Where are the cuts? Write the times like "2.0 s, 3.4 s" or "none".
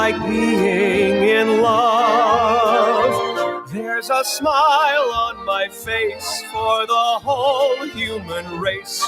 4.0 s